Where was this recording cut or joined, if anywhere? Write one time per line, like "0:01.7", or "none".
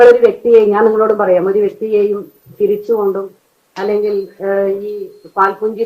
none